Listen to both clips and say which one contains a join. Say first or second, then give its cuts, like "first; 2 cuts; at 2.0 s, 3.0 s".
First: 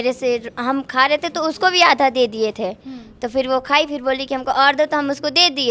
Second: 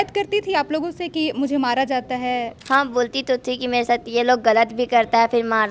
second; 1 cut; at 2.6 s